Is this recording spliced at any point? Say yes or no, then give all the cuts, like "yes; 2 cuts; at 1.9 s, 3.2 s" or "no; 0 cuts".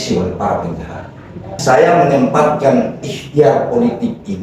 yes; 1 cut; at 1.6 s